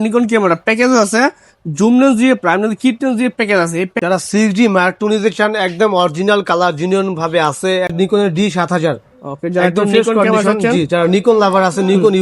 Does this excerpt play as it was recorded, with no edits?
no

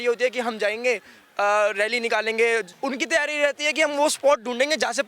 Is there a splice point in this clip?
yes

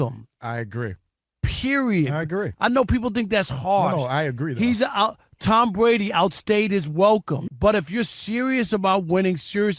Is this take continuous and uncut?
no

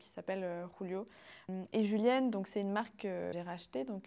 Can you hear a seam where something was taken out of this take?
yes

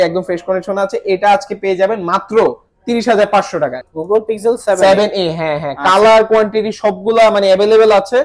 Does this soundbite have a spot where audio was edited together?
yes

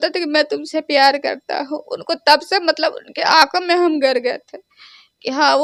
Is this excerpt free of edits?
yes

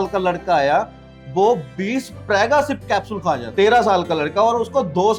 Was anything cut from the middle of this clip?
yes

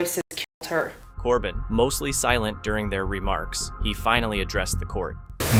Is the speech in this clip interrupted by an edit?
no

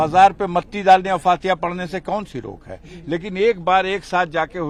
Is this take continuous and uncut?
yes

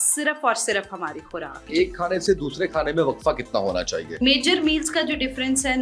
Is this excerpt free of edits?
no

